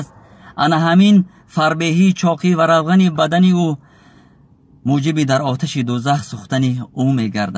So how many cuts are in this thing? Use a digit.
0